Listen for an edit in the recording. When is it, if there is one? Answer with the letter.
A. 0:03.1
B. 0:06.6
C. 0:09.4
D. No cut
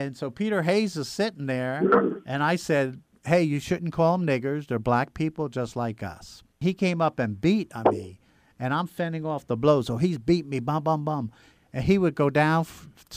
B